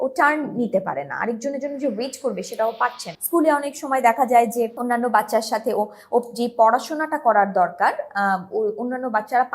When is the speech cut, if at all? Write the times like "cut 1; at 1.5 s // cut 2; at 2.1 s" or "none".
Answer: cut 1; at 3.1 s